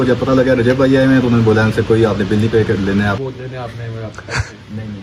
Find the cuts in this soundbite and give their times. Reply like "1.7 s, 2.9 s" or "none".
3.2 s